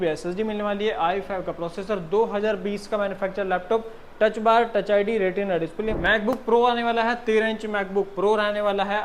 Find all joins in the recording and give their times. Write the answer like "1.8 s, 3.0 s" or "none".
5.9 s